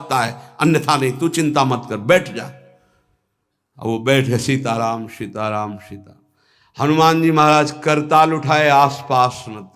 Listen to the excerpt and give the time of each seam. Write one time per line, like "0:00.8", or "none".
none